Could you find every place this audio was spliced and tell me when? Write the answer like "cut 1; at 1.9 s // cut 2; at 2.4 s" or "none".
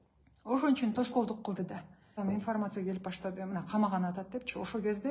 cut 1; at 2.1 s